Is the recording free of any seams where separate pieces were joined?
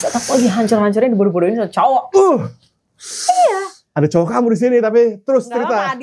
yes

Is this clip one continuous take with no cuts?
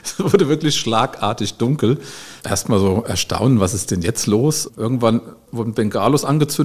no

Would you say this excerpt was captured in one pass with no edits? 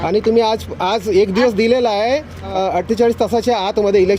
no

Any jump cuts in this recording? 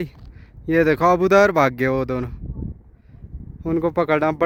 no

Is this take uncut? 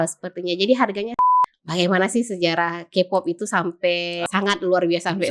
no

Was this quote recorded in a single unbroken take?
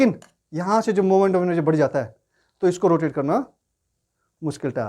yes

